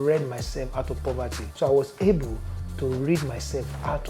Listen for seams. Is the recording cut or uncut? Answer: cut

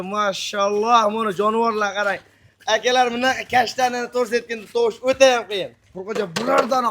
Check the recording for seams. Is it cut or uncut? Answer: cut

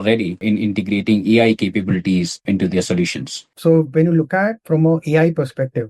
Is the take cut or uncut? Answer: cut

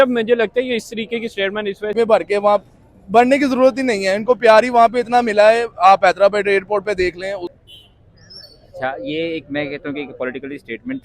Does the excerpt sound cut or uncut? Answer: cut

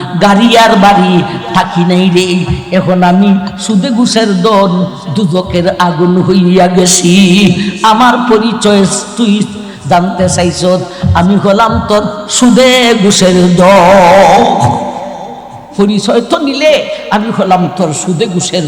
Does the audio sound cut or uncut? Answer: cut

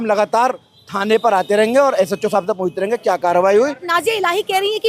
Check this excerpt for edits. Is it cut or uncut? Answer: cut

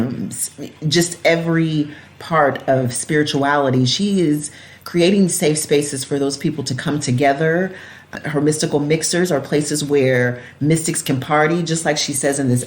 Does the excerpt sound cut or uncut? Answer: cut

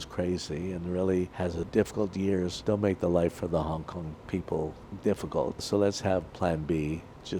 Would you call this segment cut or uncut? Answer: cut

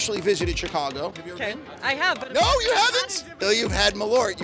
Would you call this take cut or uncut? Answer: cut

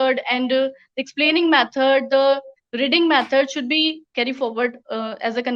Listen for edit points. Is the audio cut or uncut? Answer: cut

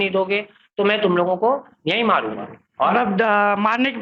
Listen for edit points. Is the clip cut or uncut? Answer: uncut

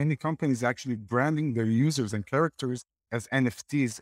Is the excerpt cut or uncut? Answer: cut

